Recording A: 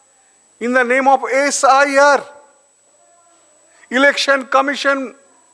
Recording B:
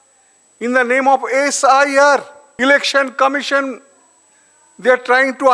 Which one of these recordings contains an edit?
B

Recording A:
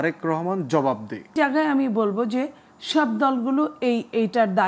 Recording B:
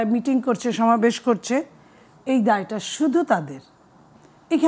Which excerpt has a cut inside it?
A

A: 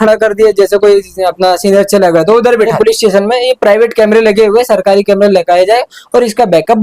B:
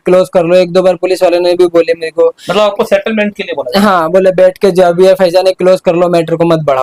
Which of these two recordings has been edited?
A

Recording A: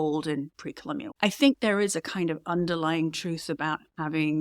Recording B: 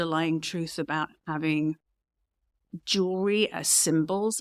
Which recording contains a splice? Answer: A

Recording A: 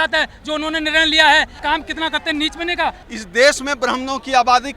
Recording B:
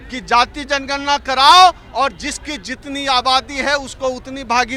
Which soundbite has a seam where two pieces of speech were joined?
A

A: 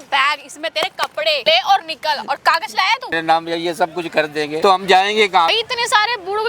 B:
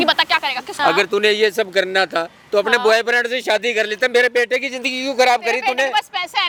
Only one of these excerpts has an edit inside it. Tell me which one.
A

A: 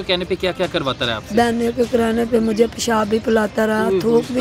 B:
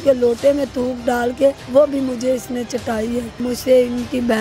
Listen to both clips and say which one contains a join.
B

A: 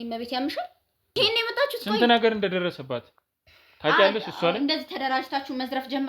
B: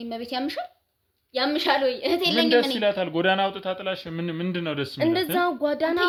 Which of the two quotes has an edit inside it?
A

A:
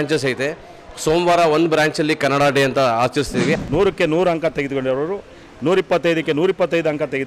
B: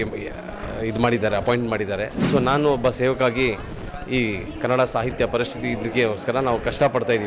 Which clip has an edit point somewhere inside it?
A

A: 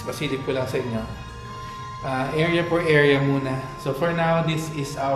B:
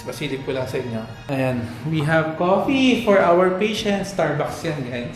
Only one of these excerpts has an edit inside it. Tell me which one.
B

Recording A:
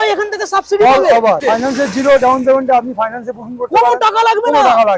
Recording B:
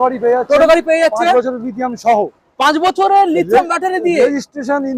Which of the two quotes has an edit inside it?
A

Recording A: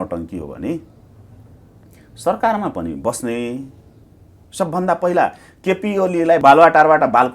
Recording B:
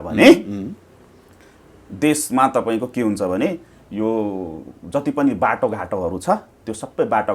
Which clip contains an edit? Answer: A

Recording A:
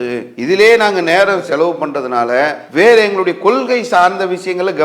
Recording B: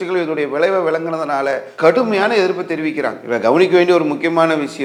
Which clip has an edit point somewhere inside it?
A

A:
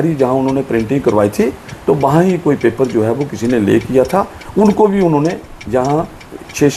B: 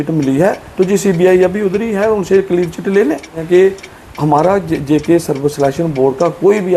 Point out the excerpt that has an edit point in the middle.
B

